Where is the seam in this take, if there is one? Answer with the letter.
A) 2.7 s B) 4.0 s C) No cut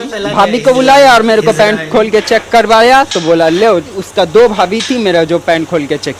B